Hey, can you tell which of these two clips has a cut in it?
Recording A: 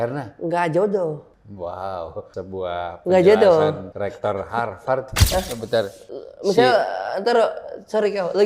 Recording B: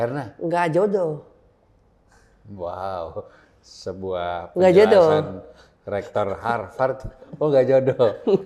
A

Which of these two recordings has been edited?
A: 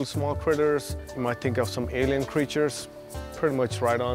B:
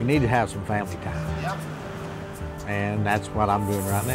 A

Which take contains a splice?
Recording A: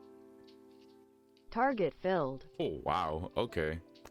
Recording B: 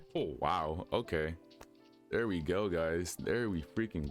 A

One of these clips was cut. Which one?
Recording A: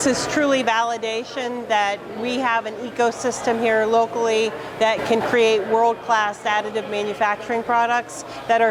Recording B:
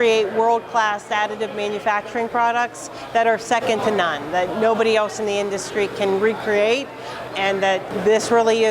B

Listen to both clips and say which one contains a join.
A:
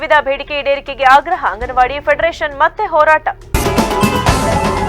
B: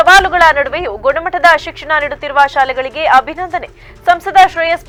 A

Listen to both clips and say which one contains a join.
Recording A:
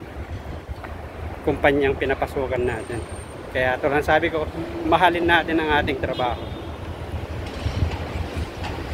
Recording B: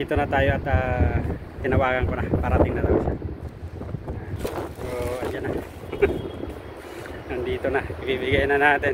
B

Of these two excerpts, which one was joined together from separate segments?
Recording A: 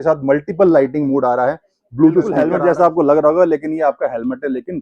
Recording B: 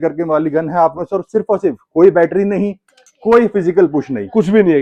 A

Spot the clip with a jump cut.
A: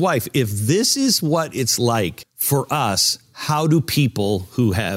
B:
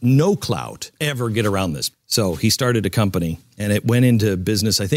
A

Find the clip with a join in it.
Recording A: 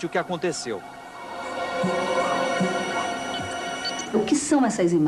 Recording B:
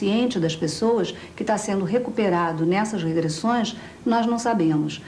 A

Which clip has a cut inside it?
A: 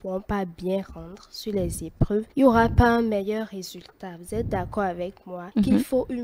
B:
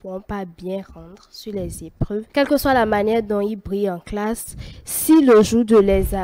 B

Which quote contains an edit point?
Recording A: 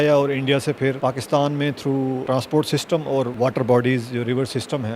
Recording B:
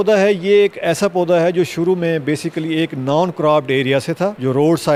A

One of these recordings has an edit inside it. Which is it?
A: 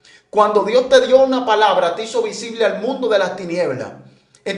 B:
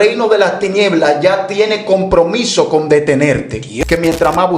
B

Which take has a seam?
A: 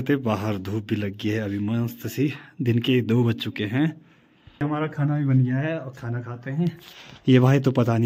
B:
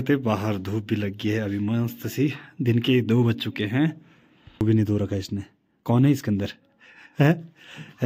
B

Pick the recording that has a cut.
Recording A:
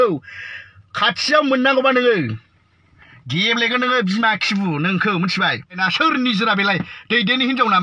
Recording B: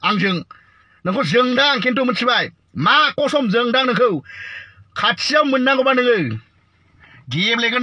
A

